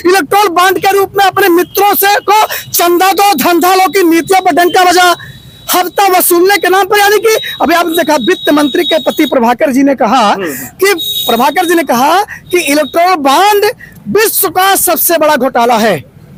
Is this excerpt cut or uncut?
uncut